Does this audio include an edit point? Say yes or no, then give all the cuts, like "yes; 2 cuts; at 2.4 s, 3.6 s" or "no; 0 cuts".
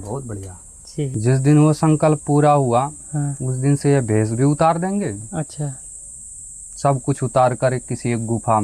yes; 1 cut; at 1.1 s